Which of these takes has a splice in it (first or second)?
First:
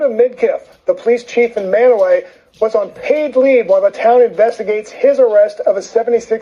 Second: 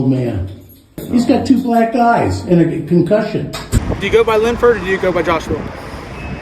second